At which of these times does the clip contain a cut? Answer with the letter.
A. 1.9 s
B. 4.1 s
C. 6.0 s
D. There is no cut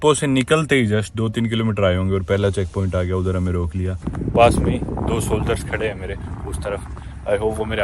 B